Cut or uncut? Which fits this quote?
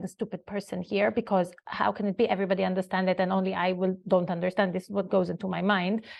uncut